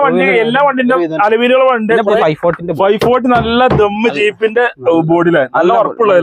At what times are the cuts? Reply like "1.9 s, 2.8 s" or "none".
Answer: 2.2 s